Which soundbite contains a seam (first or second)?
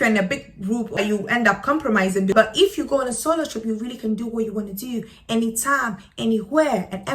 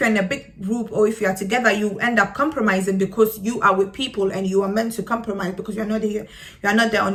first